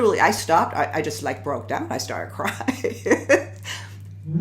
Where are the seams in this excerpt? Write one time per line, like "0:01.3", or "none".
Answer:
none